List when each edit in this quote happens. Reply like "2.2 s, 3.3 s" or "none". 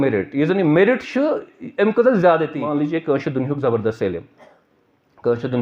2.6 s